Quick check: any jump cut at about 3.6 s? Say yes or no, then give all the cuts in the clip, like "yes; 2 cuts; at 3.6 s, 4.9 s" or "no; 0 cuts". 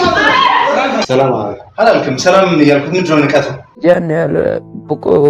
yes; 1 cut; at 3.6 s